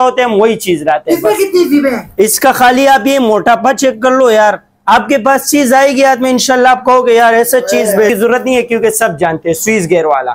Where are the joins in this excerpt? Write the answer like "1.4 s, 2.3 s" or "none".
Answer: 2.4 s, 8.1 s